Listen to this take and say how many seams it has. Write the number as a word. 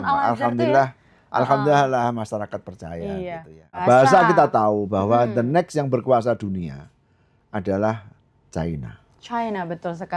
one